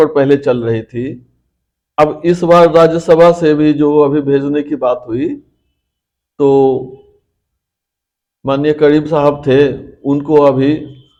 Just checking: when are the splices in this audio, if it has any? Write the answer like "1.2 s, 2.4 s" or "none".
none